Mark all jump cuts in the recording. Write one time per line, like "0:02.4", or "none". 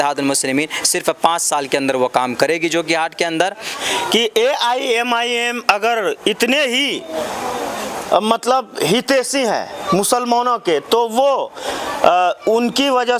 0:03.7